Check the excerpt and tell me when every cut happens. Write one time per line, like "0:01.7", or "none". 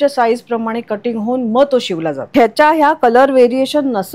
0:02.2